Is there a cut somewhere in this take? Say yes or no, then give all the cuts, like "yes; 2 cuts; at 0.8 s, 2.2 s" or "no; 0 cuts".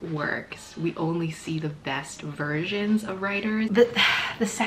yes; 1 cut; at 3.7 s